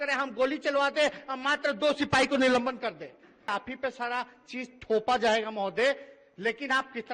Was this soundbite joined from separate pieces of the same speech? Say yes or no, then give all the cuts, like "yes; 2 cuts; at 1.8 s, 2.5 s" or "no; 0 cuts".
yes; 1 cut; at 3.4 s